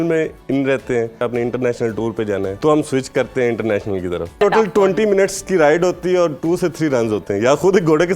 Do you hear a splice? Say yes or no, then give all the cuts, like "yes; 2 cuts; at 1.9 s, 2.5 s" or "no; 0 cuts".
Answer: yes; 3 cuts; at 1.2 s, 2.6 s, 4.4 s